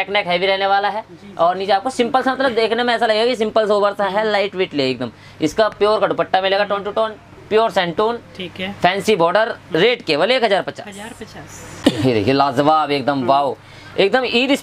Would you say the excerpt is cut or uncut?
uncut